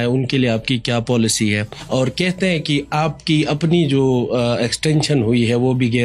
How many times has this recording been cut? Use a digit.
1